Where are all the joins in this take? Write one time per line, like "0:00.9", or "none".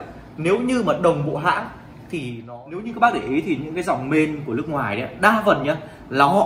0:02.4